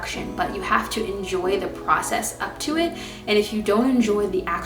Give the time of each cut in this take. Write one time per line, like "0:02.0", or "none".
none